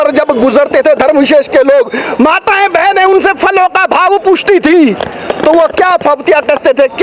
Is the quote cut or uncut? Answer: uncut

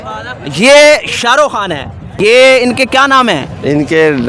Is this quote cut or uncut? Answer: cut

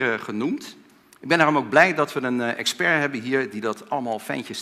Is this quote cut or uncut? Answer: uncut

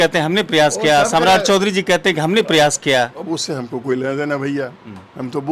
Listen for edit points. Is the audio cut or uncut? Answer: uncut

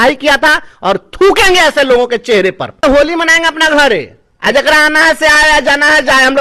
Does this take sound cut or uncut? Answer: cut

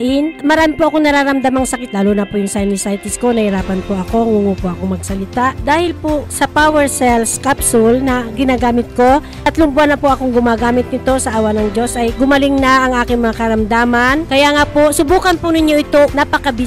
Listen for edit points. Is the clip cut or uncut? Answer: uncut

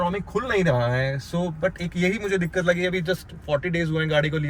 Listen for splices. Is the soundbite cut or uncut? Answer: uncut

